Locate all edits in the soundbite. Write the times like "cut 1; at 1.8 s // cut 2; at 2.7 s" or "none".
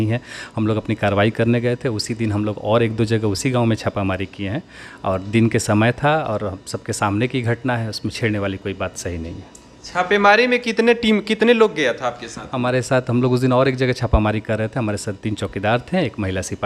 none